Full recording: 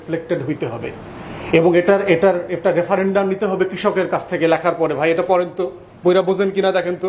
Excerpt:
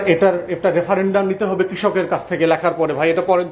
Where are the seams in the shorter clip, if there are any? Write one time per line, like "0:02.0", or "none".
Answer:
none